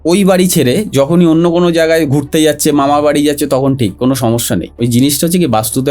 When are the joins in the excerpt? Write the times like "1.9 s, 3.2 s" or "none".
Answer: 4.9 s